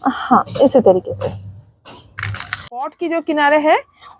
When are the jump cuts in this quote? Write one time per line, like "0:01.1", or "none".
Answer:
0:02.9